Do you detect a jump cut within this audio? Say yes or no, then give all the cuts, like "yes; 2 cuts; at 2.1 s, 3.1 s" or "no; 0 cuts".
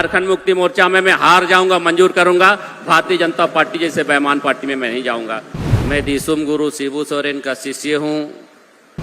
yes; 1 cut; at 5.5 s